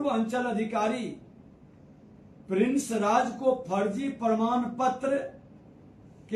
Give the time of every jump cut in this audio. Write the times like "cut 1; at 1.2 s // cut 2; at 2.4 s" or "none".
none